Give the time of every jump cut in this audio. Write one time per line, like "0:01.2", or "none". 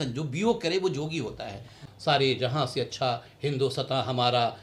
0:01.9